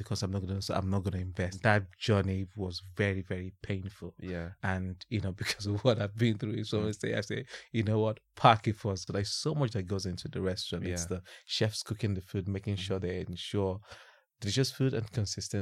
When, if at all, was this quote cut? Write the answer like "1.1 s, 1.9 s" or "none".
1.6 s, 9.0 s

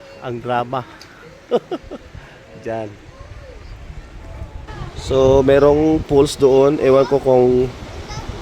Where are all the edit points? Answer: 4.7 s

